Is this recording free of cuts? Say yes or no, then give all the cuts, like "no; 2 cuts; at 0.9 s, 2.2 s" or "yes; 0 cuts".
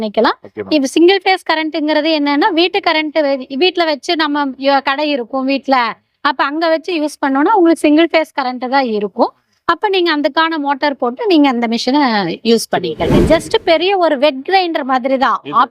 no; 1 cut; at 13.2 s